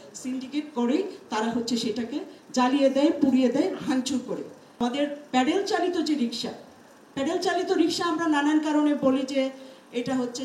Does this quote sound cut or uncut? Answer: cut